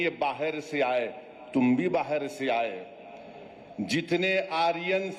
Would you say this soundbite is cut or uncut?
uncut